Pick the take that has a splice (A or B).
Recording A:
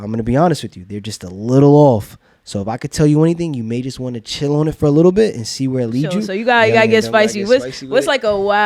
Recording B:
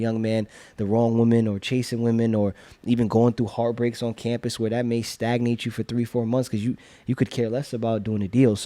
A